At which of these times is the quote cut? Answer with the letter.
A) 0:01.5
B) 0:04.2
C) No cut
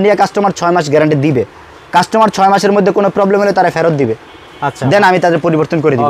C